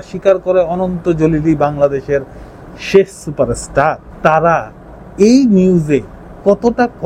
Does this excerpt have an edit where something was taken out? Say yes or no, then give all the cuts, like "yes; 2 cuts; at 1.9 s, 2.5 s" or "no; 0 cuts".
yes; 1 cut; at 4.1 s